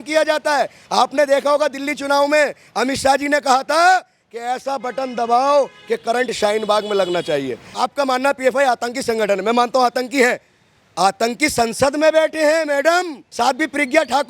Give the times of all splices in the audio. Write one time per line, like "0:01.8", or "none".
0:07.7
0:13.2